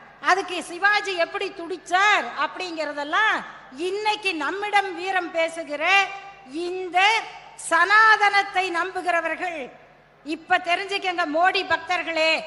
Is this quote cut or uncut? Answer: uncut